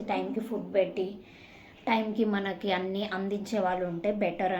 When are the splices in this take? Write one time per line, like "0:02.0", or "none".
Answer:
none